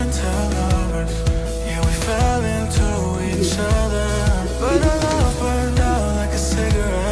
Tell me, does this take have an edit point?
no; 0 cuts

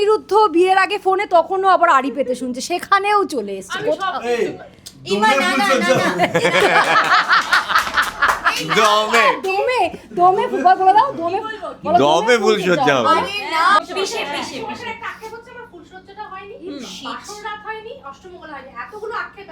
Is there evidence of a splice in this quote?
yes; 1 cut; at 13.8 s

